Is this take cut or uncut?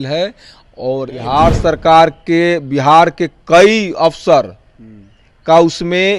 cut